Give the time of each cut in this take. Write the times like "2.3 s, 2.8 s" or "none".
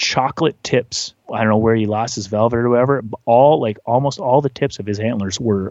1.2 s